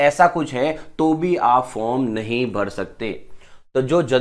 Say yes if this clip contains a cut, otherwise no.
no